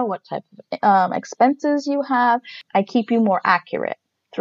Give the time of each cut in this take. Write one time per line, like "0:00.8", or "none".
0:02.6